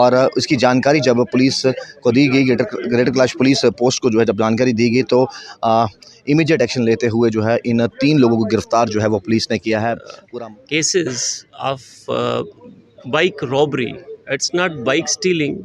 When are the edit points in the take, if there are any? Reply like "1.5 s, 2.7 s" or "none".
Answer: 10.1 s

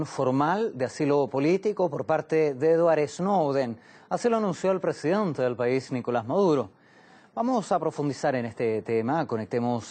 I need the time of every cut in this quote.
8.5 s

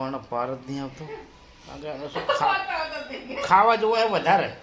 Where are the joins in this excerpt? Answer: none

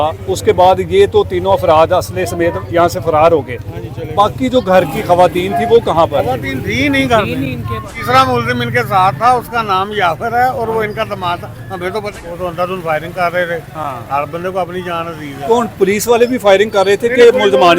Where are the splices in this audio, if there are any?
7.9 s, 12.2 s

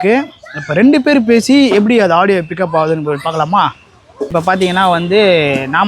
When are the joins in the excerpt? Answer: 4.3 s

